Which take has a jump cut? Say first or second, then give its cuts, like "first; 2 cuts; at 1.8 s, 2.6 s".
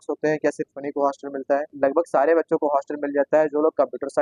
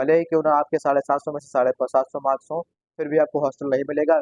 first; 1 cut; at 1.7 s